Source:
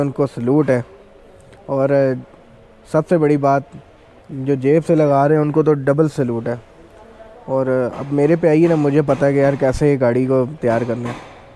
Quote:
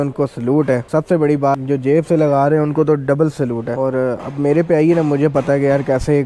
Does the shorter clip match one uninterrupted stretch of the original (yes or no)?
no